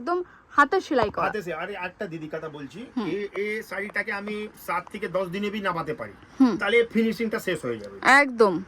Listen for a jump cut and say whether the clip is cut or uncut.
uncut